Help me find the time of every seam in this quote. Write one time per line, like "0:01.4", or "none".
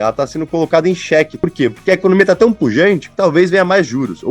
0:01.3